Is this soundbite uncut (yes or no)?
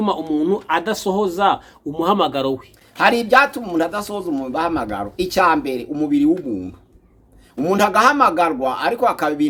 yes